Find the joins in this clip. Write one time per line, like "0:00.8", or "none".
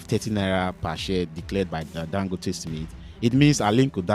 0:01.9